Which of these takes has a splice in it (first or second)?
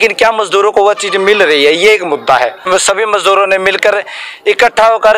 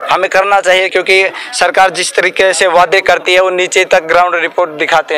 first